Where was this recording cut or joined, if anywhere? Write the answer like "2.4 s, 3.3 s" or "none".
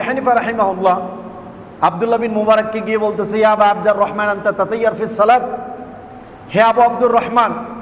none